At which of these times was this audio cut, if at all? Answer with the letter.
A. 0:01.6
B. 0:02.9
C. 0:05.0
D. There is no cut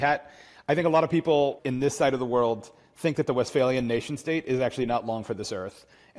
A